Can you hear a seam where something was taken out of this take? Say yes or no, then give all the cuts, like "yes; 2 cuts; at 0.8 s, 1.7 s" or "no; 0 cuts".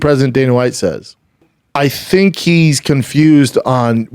yes; 1 cut; at 1.6 s